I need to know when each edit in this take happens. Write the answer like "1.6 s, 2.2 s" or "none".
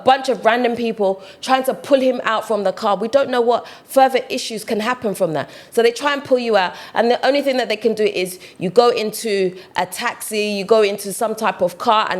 none